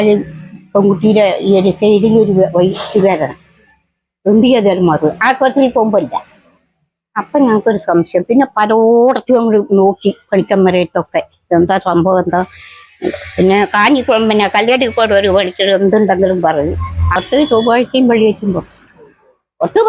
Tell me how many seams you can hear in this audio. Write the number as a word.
one